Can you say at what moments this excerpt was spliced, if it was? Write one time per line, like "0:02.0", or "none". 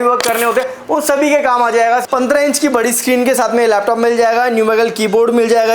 0:02.0